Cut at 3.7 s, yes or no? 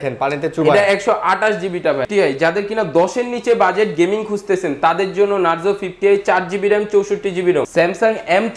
no